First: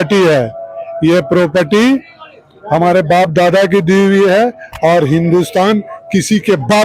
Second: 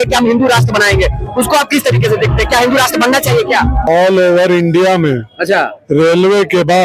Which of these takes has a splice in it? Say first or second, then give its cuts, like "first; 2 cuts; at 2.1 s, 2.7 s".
second; 1 cut; at 3.9 s